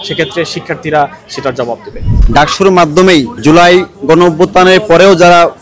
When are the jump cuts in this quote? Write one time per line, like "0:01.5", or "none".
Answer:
0:02.1
0:03.3